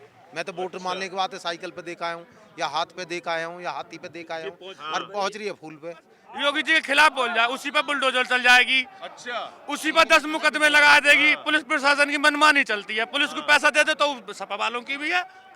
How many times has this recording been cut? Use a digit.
1